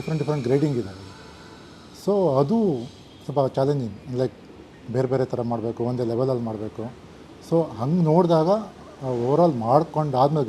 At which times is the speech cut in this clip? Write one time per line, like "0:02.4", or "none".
none